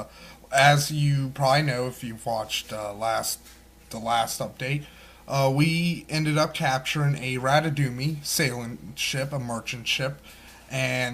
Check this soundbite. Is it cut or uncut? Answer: uncut